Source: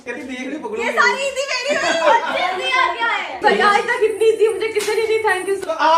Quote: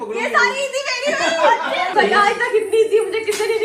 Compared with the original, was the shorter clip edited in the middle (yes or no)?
yes